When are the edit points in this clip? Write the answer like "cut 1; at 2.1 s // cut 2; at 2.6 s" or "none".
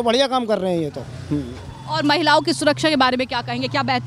none